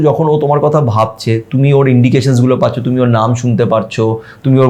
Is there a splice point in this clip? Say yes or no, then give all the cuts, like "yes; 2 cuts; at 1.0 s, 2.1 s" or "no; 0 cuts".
no; 0 cuts